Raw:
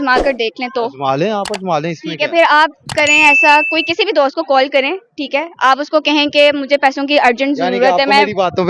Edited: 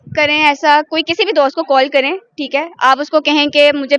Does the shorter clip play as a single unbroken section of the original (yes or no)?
yes